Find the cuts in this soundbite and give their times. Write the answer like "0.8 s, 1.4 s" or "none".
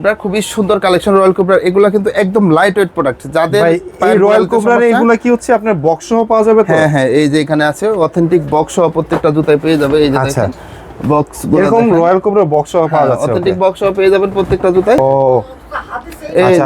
15.0 s

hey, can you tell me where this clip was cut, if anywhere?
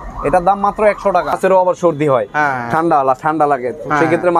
1.4 s

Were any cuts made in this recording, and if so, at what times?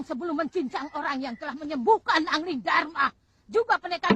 none

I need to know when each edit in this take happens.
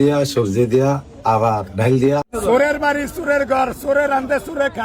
2.3 s

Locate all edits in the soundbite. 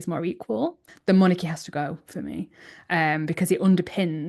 1.0 s

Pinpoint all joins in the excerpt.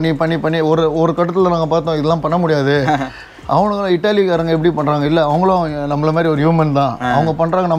none

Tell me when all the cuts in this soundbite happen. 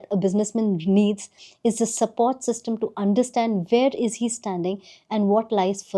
none

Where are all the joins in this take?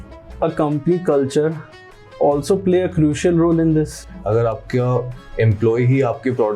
4.1 s

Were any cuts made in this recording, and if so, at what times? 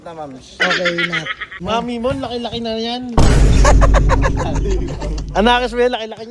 1.4 s

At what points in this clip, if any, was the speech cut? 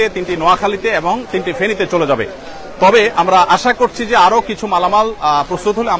none

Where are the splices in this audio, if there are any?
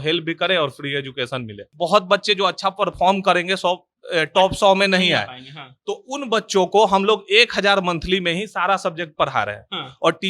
1.7 s

